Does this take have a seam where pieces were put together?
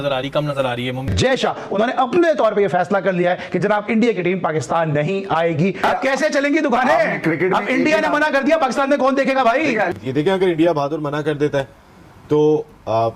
yes; 2 cuts; at 1.0 s, 9.9 s

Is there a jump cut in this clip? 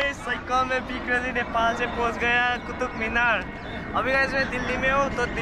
no; 0 cuts

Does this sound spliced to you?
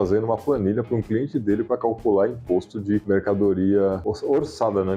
yes; 2 cuts; at 3.0 s, 4.1 s

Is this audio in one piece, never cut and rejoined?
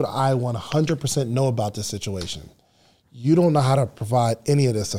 yes; 0 cuts

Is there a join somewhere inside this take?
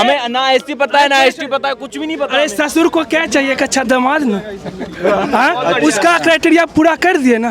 no; 0 cuts

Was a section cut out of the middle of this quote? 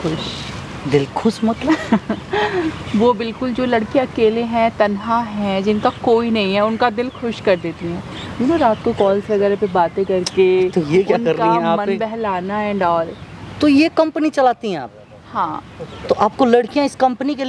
no; 0 cuts

